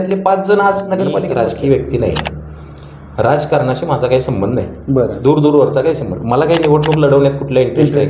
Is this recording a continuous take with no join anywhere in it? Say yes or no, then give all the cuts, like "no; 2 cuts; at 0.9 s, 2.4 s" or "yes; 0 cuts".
no; 1 cut; at 1.3 s